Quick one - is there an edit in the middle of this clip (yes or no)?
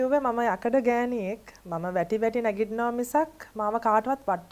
no